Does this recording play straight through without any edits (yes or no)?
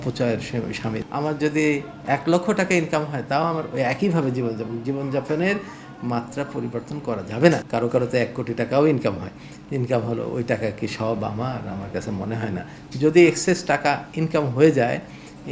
no